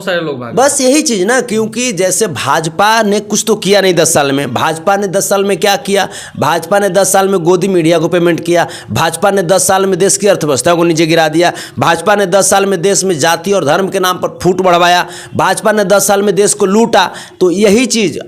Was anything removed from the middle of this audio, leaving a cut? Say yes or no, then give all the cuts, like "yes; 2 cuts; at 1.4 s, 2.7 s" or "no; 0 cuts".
no; 0 cuts